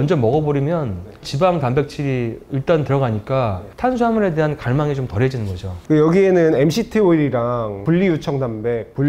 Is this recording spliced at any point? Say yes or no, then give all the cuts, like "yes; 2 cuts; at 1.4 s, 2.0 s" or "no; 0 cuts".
no; 0 cuts